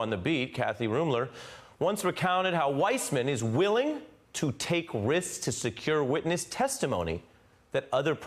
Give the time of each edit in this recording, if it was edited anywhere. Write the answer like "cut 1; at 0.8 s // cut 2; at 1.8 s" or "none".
cut 1; at 7.4 s